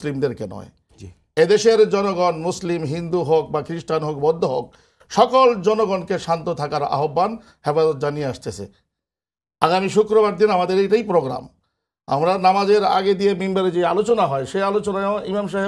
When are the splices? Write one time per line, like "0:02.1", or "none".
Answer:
none